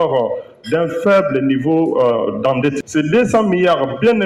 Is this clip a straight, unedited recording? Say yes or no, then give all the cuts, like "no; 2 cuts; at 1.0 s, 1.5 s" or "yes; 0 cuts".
no; 1 cut; at 2.8 s